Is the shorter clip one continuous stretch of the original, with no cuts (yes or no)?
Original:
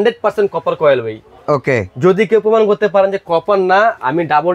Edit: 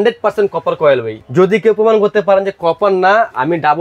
no